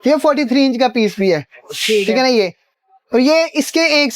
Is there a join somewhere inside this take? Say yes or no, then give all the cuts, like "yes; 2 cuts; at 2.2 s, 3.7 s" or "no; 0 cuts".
no; 0 cuts